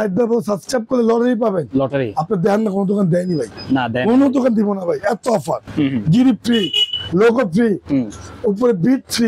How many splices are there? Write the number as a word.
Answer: zero